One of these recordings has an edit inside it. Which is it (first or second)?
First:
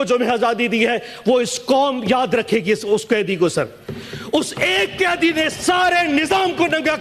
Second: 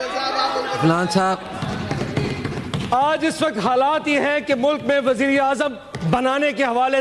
second